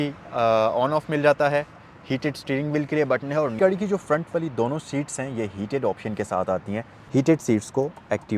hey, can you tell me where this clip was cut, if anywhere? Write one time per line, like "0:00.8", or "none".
0:03.5
0:07.0